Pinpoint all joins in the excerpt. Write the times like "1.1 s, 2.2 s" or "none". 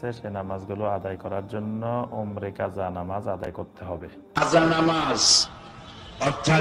4.1 s